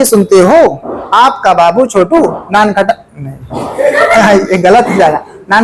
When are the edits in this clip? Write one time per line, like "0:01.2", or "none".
none